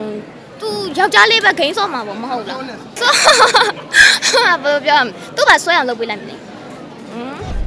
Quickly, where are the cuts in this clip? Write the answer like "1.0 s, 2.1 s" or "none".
2.9 s

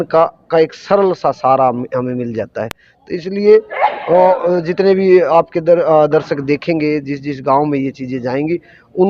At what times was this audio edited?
none

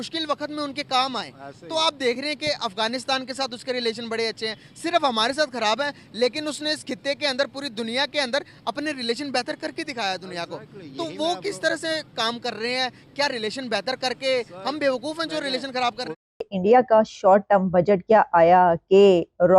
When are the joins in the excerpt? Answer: 16.3 s

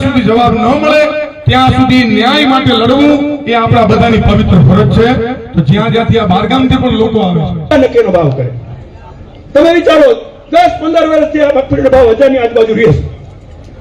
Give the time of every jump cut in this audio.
7.7 s

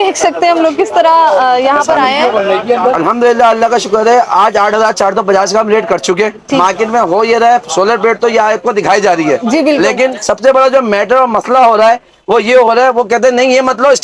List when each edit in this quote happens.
3.0 s, 6.6 s

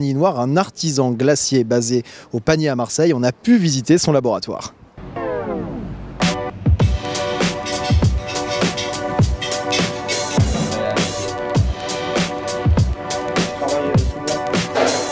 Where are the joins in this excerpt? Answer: 8.5 s

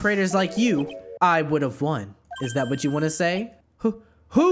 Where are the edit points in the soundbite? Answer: 1.0 s, 3.6 s

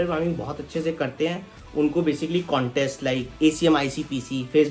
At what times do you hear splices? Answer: 3.3 s

